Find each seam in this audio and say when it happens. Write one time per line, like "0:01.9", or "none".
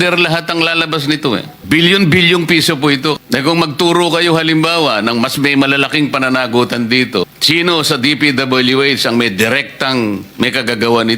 0:01.5
0:03.2
0:07.3